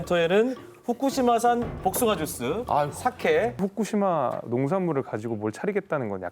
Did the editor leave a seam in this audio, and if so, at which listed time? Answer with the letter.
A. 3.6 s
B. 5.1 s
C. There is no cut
A